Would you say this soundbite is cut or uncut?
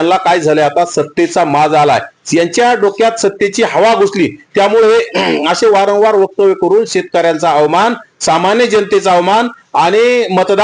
uncut